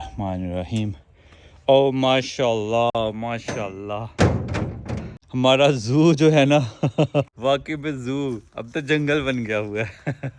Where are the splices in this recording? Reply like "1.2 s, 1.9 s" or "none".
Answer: none